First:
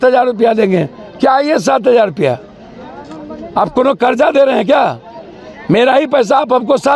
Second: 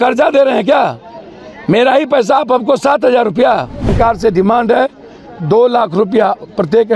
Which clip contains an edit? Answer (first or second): second